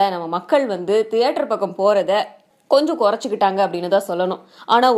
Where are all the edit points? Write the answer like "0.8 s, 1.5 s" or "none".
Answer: none